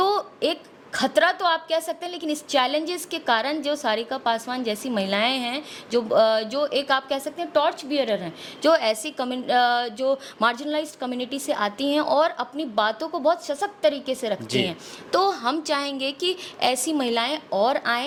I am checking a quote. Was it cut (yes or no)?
no